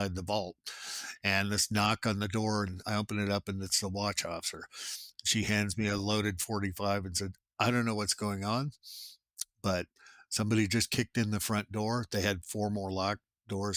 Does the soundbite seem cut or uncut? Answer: uncut